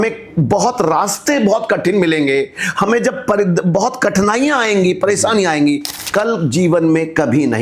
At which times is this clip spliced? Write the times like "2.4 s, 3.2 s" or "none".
5.9 s